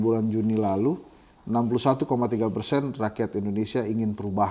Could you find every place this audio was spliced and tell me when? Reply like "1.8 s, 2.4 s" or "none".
none